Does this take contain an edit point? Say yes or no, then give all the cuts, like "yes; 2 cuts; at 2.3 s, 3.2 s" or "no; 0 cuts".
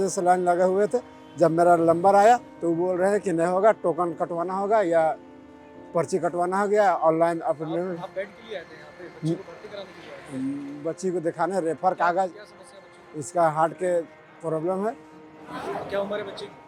no; 0 cuts